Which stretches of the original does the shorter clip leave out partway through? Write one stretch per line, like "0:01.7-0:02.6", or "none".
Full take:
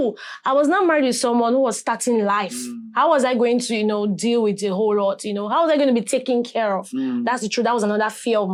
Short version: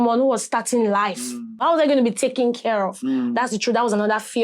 0:02.9-0:05.4